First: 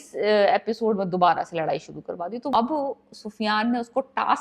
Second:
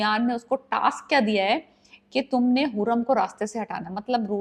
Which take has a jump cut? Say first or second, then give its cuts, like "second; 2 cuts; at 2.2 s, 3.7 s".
first; 1 cut; at 2.5 s